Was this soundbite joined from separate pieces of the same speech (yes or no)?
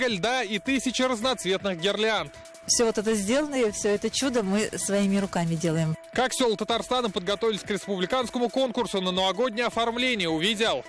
no